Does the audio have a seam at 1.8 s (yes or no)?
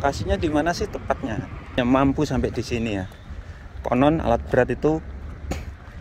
yes